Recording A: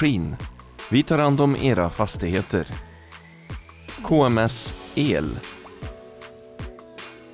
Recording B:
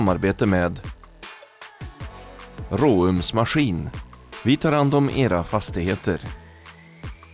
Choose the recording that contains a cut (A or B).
A